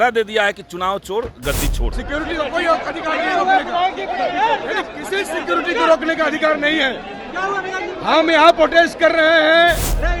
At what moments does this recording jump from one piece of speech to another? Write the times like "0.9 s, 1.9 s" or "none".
1.9 s